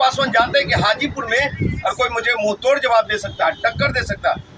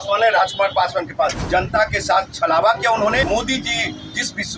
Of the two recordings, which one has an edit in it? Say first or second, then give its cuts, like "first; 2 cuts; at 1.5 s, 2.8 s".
second; 2 cuts; at 1.4 s, 3.2 s